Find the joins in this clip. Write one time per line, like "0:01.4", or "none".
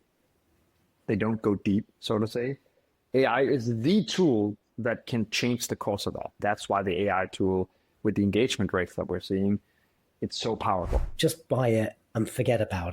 0:06.4
0:11.1

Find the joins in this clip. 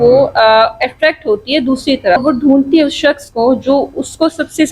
0:02.2

